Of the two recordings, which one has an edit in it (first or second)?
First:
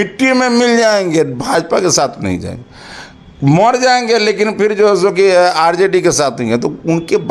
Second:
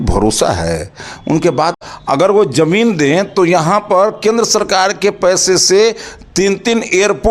second